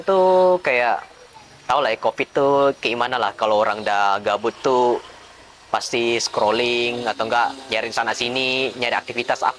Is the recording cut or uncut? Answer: uncut